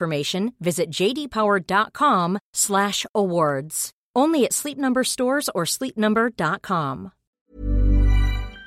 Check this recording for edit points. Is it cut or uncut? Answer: cut